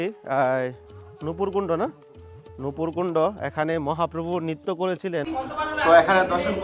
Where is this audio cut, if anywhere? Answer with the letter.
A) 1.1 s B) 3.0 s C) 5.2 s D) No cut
C